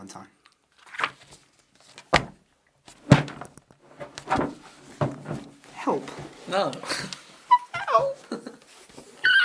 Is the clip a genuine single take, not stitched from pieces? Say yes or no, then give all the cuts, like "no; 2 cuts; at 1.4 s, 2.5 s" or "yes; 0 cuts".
yes; 0 cuts